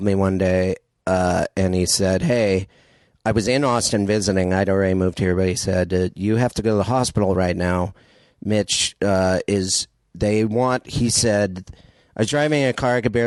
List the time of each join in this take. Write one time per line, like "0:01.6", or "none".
none